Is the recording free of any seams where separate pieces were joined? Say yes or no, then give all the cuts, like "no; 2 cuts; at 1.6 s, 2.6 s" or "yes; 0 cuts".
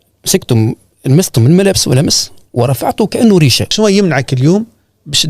no; 1 cut; at 3.6 s